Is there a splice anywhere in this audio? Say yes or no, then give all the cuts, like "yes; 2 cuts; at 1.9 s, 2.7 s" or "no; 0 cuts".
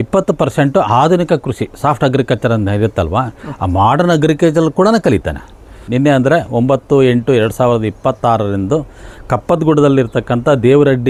no; 0 cuts